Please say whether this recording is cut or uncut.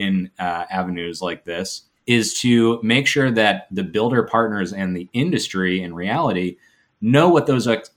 cut